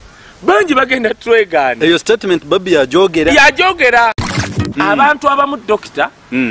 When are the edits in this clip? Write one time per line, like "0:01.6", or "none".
0:04.5

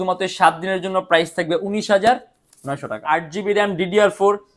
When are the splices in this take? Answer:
0:03.0

